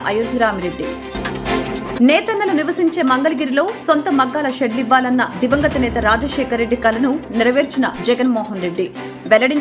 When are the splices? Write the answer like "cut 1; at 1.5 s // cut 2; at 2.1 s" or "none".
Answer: none